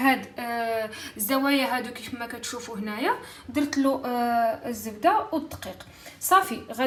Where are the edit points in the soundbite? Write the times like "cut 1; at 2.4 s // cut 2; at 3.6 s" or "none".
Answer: none